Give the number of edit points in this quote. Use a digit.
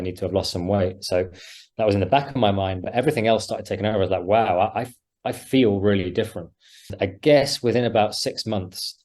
1